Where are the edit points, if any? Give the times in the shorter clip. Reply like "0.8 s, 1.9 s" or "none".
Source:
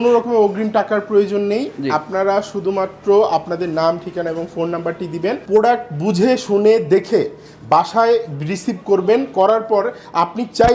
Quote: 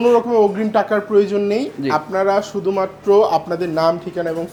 none